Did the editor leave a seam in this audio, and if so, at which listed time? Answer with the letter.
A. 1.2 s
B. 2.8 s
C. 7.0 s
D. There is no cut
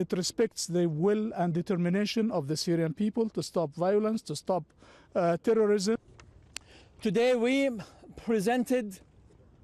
B